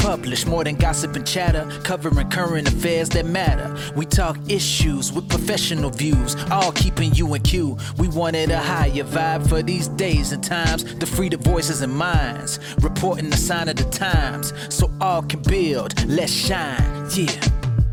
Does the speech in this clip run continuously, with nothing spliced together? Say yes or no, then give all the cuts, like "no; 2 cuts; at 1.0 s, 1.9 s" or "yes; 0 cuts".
yes; 0 cuts